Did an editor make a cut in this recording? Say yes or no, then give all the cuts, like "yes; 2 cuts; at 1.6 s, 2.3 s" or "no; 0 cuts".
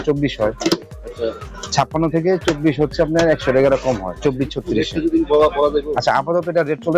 no; 0 cuts